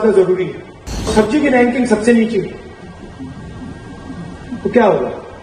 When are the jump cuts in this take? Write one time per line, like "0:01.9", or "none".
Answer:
0:01.1